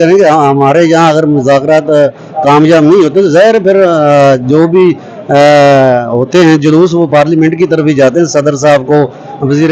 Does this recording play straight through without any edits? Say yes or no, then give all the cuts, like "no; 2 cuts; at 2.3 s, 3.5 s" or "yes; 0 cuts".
yes; 0 cuts